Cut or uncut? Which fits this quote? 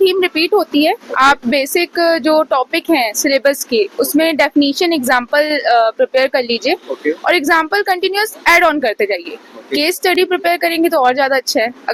uncut